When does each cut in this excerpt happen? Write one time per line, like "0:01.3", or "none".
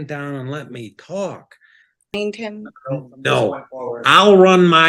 0:02.1